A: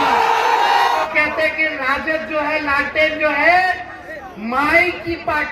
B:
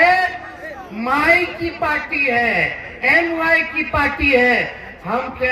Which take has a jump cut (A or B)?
A